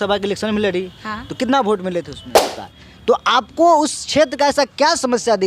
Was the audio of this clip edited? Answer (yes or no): yes